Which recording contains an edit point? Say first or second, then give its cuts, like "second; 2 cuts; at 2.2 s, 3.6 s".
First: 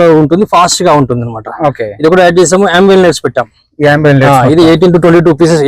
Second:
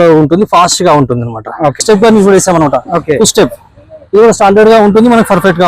second; 1 cut; at 1.8 s